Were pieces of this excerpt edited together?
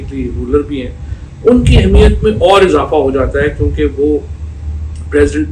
no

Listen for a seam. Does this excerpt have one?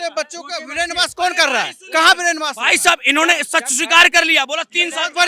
no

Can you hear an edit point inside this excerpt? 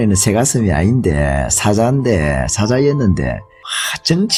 no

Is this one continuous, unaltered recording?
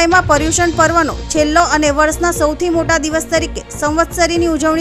yes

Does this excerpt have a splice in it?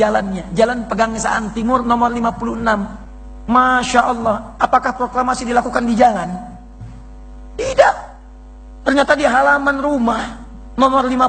no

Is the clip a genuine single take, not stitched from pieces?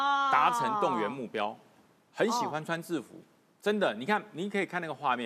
yes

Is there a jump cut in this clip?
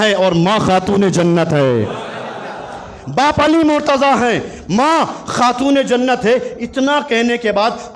no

